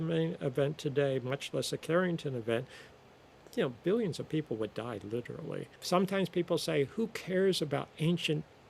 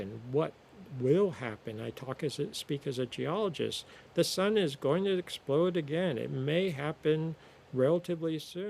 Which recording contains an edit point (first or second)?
first